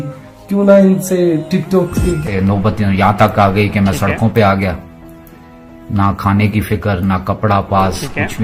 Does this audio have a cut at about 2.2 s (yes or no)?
yes